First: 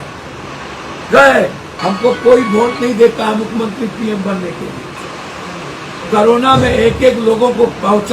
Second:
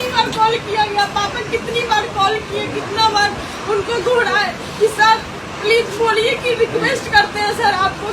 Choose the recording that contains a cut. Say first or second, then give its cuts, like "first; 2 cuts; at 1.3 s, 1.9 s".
first; 1 cut; at 1.7 s